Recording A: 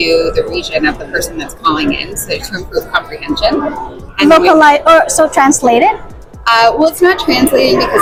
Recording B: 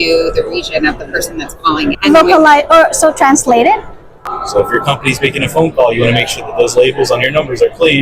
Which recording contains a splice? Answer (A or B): B